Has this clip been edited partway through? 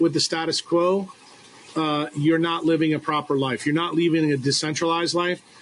no; 0 cuts

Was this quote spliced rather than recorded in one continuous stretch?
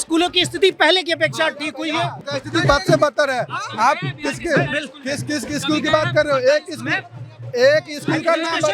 yes; 1 cut; at 2.2 s

